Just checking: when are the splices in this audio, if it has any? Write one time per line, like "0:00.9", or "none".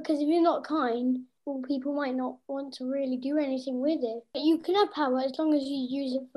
0:01.4
0:04.4